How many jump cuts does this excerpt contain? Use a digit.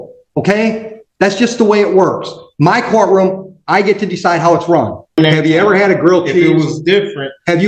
1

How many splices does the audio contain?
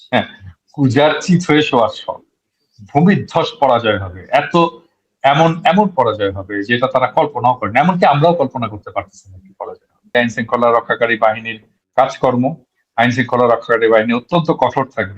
1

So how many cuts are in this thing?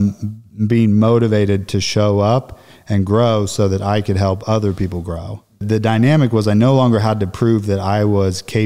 1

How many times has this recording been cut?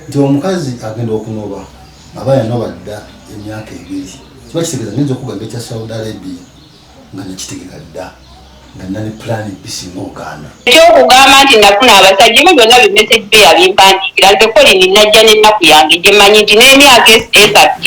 1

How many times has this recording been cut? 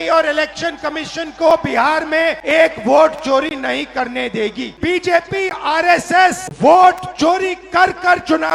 3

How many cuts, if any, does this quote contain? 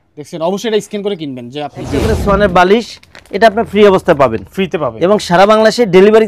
1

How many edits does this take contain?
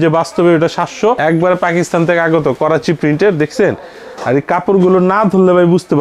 1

